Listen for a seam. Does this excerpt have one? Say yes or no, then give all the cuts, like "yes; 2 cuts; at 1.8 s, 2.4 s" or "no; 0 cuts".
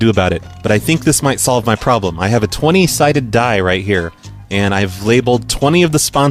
no; 0 cuts